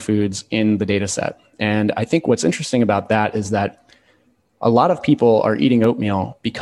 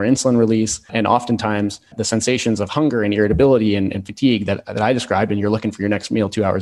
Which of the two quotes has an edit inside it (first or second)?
second